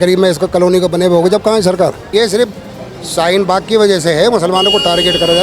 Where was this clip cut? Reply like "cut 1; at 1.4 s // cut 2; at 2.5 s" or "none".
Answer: cut 1; at 2.0 s